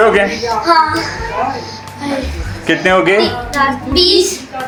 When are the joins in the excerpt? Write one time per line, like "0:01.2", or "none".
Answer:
none